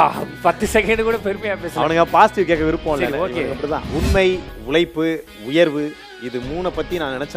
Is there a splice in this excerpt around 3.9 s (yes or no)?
yes